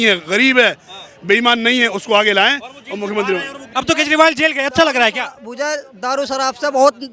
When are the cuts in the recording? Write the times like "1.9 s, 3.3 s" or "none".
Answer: 3.7 s